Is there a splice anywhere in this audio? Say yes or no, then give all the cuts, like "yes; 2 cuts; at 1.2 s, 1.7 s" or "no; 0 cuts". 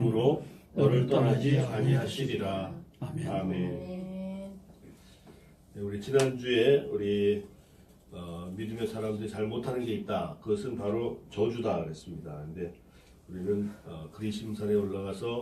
yes; 1 cut; at 13.4 s